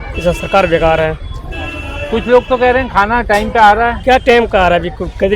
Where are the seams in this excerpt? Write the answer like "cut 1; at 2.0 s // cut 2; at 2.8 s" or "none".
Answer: none